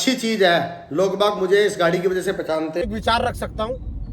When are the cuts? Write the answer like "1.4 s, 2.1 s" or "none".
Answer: 2.8 s